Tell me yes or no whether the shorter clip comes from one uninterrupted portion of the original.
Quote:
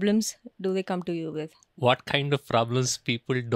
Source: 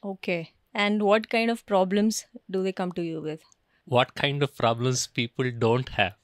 no